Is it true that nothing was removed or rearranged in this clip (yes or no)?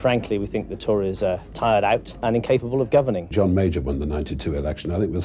no